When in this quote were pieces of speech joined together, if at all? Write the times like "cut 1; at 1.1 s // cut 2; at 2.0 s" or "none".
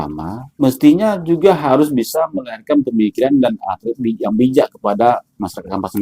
none